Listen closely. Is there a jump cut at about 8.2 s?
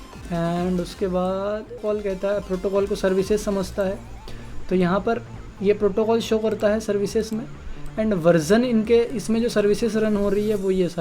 no; 1 cut; at 1.8 s

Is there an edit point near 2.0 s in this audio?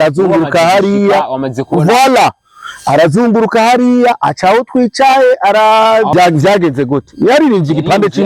no; 1 cut; at 6.1 s

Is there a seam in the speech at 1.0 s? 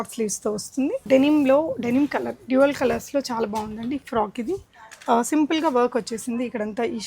yes; 1 cut; at 1.0 s

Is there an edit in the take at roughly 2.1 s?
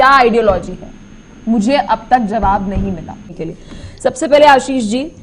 no; 1 cut; at 3.3 s

